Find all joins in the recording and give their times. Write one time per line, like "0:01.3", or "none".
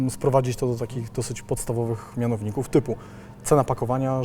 none

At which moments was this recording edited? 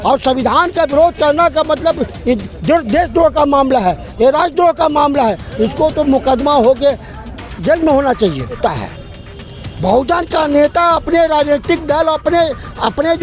0:08.6

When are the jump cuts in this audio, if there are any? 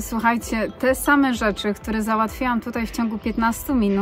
none

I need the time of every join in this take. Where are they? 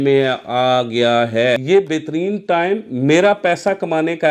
0:01.6

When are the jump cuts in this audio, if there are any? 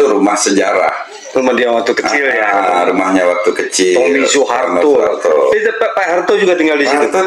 none

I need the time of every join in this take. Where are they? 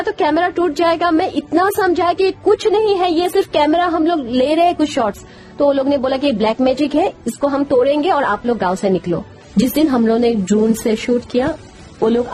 0:09.3

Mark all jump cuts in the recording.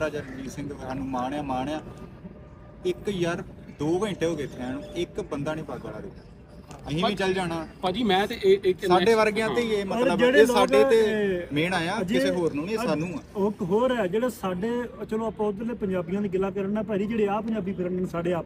none

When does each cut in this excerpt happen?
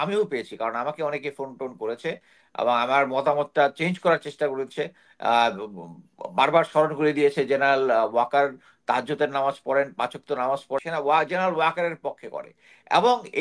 0:10.8

